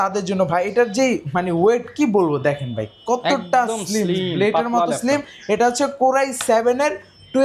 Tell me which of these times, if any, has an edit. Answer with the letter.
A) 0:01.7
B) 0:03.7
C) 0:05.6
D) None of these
D